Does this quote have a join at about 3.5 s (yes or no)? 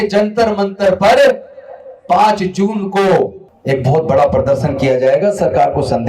yes